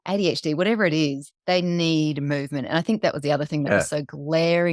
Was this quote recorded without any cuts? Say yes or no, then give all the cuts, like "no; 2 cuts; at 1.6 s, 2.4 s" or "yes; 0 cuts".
yes; 0 cuts